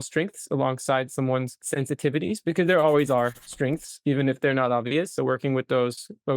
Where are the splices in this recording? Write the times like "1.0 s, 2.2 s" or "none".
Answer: 1.6 s